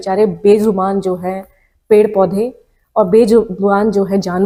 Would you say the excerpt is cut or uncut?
uncut